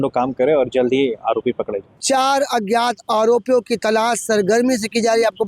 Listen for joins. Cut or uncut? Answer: cut